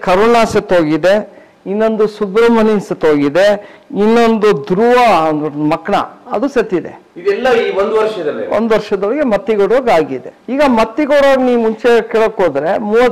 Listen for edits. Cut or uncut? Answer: uncut